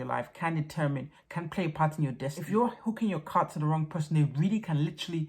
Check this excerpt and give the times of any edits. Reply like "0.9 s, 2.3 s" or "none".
2.4 s